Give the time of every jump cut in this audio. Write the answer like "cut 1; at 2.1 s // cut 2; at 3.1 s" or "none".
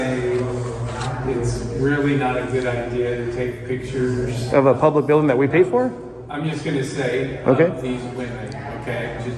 none